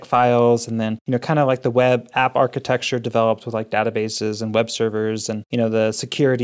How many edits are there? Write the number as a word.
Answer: two